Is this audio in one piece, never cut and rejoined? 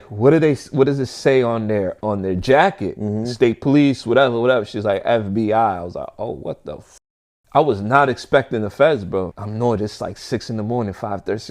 no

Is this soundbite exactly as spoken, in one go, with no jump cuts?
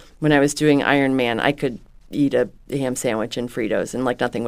yes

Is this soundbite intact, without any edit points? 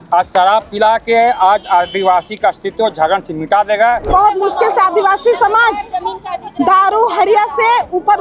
no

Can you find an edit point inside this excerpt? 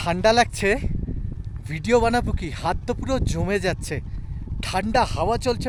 no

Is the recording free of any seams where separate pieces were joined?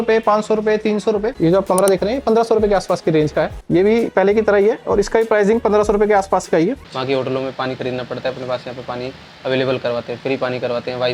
no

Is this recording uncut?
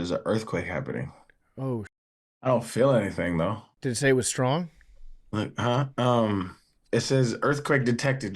no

